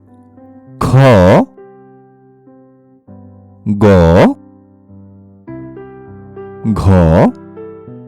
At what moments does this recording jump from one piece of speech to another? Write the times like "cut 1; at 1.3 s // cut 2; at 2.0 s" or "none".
cut 1; at 1.5 s // cut 2; at 3.6 s // cut 3; at 4.4 s // cut 4; at 6.4 s // cut 5; at 7.3 s

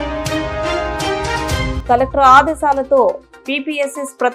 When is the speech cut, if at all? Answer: cut 1; at 1.7 s

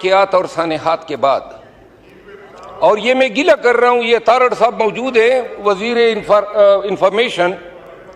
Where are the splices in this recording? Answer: none

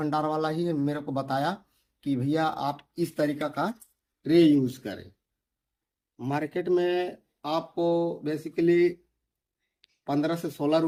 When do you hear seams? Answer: none

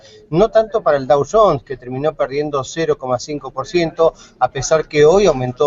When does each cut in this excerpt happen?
none

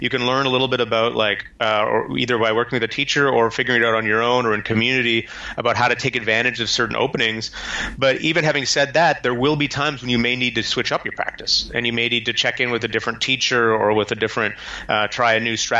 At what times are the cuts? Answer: none

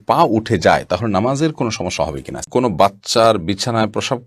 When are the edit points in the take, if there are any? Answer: cut 1; at 2.5 s

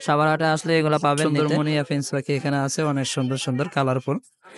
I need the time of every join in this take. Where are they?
cut 1; at 1.2 s

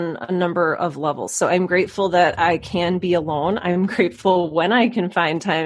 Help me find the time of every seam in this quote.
none

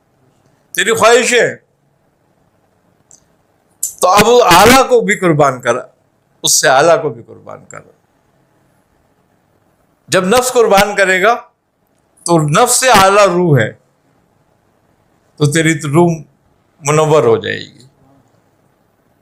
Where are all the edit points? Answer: none

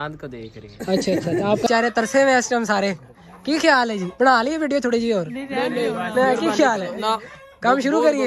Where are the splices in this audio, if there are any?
cut 1; at 1.2 s

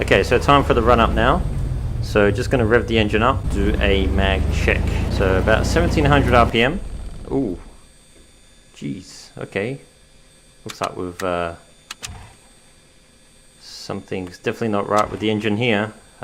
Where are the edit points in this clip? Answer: cut 1; at 3.5 s // cut 2; at 5.1 s

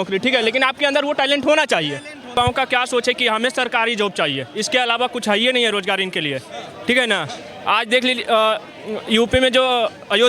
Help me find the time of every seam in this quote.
cut 1; at 2.4 s

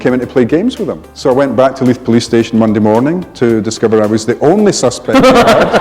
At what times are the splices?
cut 1; at 1.1 s

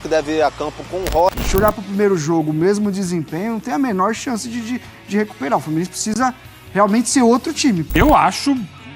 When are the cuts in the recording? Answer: cut 1; at 1.3 s // cut 2; at 7.9 s

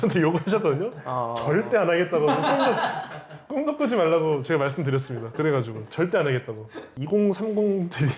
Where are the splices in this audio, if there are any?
cut 1; at 6.9 s

